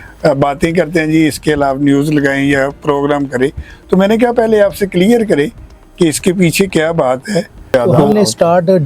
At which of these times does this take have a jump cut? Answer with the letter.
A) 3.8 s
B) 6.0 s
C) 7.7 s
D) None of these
C